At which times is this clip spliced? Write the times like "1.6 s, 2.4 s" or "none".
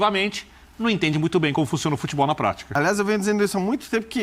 2.8 s